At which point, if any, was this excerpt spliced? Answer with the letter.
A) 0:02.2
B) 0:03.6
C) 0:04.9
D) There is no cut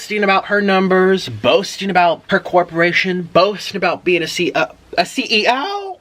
A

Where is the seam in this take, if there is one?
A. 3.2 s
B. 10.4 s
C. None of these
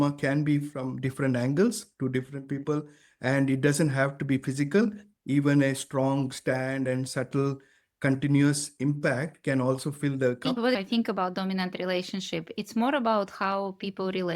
B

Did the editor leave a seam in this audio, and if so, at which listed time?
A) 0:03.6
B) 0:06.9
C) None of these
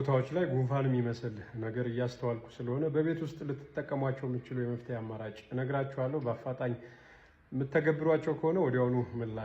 C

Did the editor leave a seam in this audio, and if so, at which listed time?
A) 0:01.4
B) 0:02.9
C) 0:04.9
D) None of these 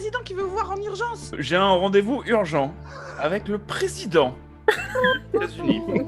A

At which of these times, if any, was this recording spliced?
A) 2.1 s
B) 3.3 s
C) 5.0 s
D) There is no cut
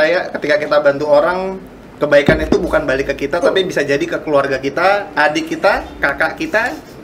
D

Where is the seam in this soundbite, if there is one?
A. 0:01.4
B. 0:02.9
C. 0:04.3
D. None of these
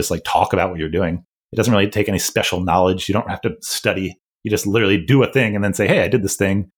A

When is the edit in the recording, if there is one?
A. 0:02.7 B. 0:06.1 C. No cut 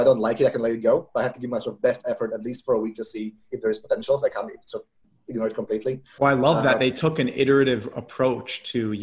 B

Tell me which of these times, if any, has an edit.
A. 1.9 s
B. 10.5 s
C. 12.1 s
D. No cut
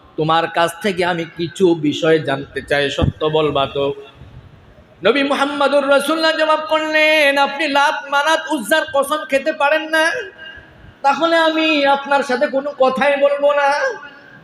D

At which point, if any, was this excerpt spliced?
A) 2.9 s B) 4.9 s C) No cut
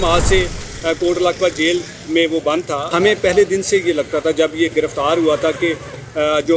A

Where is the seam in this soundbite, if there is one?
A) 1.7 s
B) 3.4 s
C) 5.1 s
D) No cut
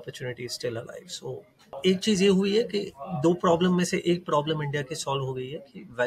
A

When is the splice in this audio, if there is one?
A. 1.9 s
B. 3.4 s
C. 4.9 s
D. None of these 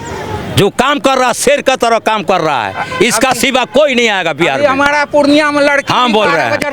D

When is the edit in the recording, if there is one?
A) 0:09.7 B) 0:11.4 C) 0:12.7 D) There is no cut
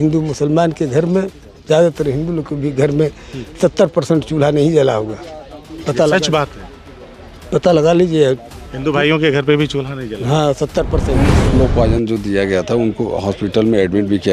B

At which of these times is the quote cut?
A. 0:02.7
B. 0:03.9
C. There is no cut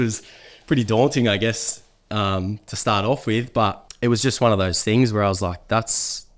B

